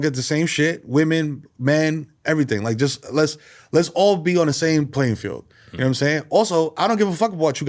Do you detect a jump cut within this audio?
no; 0 cuts

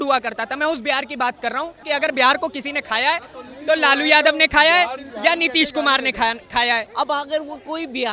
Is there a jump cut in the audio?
yes; 2 cuts; at 1.8 s, 6.9 s

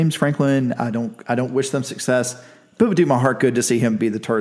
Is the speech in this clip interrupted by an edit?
no; 0 cuts

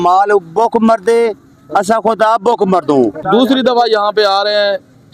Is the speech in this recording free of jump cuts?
no; 1 cut; at 3.3 s

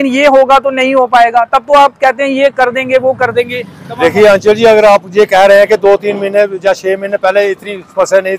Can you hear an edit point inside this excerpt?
no; 0 cuts

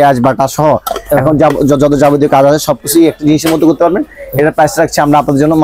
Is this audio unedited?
yes; 0 cuts

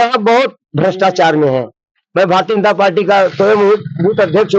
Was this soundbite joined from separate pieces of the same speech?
no; 0 cuts

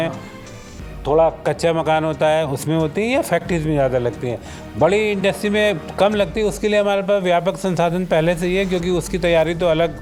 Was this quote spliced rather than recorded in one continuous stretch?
no; 0 cuts

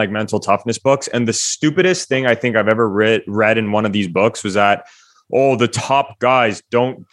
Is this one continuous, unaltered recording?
yes; 0 cuts

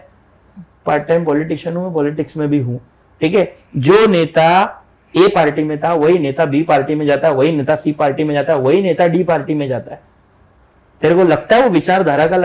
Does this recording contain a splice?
no; 0 cuts

